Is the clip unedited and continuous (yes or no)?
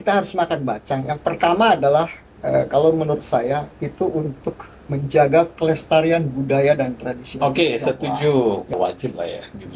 no